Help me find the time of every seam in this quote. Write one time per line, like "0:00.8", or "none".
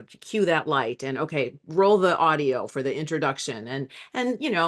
none